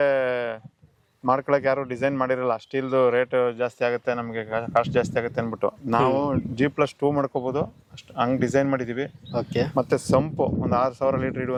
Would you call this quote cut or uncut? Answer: uncut